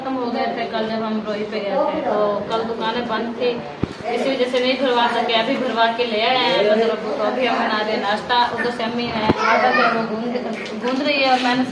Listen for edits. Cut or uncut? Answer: uncut